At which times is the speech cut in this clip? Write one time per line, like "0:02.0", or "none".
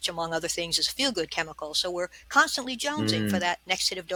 none